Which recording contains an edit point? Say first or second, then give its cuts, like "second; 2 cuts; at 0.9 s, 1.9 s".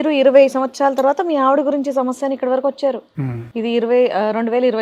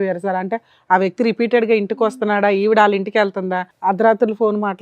second; 1 cut; at 3.6 s